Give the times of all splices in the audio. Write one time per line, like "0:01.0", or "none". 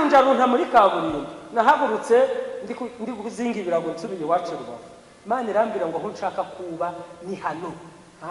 none